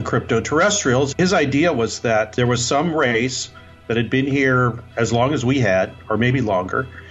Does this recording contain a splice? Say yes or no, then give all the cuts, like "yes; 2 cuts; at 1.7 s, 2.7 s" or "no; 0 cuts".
yes; 2 cuts; at 1.1 s, 2.3 s